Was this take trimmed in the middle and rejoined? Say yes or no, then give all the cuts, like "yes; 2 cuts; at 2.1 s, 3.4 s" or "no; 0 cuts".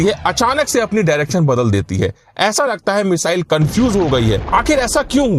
yes; 1 cut; at 4.4 s